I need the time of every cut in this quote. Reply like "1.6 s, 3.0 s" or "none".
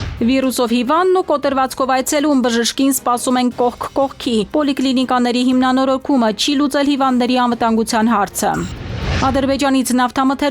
9.0 s